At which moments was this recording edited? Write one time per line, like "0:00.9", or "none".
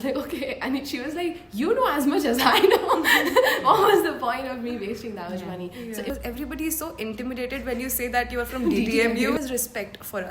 0:06.1
0:09.4